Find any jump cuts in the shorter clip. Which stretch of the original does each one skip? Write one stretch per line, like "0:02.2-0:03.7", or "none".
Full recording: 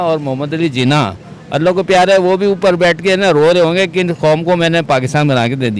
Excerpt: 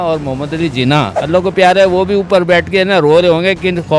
0:01.2-0:01.5